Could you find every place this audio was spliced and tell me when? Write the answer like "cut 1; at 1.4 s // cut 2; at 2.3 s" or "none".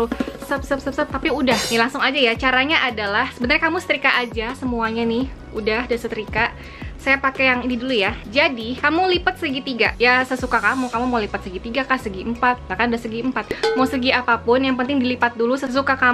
none